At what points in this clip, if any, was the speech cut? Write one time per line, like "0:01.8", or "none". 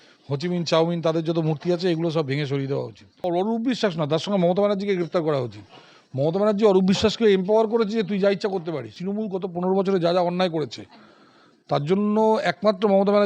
0:03.2
0:09.0